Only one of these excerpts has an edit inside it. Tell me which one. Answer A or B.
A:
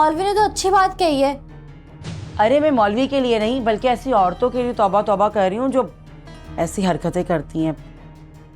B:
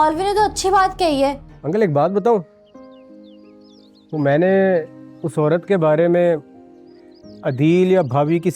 B